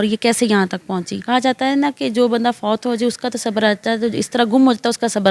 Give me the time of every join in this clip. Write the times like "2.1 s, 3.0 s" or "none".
1.1 s